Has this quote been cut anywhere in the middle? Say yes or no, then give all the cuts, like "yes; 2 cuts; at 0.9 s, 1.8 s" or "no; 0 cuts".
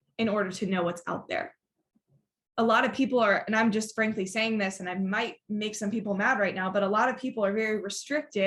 no; 0 cuts